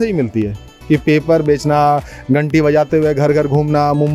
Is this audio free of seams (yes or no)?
yes